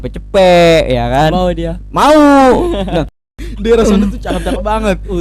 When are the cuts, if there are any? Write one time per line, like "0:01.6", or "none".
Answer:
0:03.4